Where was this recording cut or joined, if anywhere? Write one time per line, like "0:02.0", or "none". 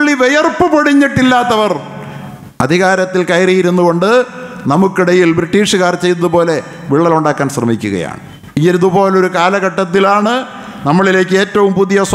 none